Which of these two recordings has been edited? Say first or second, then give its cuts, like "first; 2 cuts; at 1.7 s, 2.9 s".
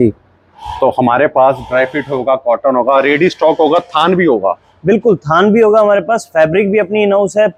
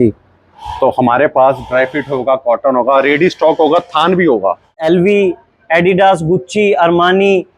second; 1 cut; at 4.8 s